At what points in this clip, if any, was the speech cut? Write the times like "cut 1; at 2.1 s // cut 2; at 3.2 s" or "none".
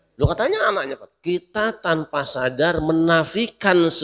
cut 1; at 1.1 s

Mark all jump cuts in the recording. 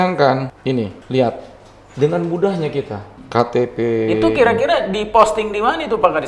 none

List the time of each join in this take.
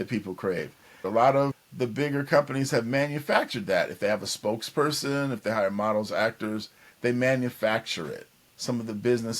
cut 1; at 8.4 s

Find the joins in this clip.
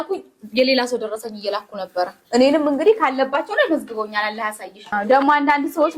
cut 1; at 5.0 s

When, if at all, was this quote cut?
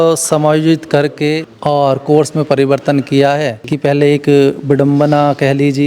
cut 1; at 1.5 s // cut 2; at 3.6 s

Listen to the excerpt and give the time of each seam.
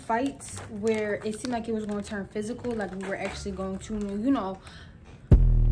none

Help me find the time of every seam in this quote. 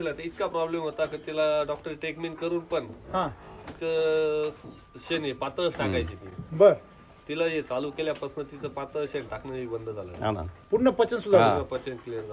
none

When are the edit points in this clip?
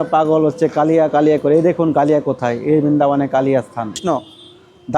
cut 1; at 4.0 s

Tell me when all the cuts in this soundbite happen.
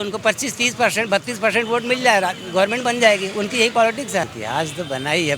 cut 1; at 4.3 s

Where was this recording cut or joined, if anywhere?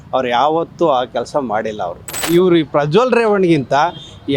cut 1; at 2.1 s

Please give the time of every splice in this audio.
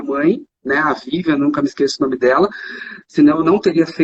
none

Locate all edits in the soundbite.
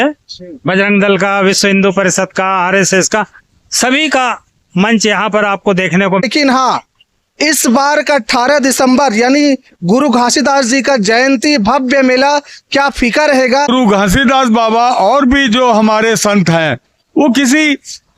cut 1; at 6.2 s // cut 2; at 13.7 s

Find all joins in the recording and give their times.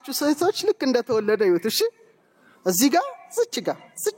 none

